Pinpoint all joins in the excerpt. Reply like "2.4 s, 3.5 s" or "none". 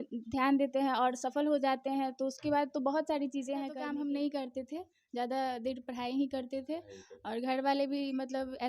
3.8 s